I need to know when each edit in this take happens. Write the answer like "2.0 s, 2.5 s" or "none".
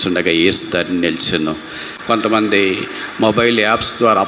1.9 s